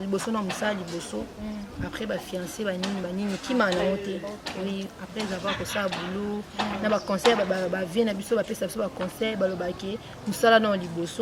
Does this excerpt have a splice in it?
no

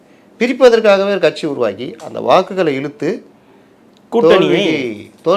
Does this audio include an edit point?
no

